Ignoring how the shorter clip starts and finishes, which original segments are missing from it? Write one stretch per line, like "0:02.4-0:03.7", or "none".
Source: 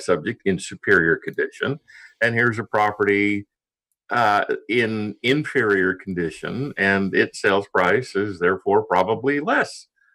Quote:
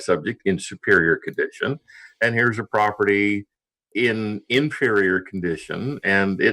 0:03.9-0:04.6